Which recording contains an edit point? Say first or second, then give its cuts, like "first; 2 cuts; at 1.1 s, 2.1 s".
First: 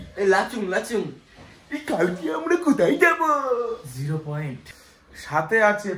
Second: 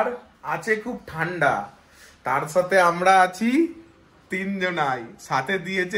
first; 1 cut; at 4.7 s